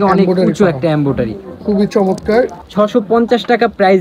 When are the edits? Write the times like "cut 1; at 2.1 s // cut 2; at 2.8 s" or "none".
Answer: cut 1; at 2.6 s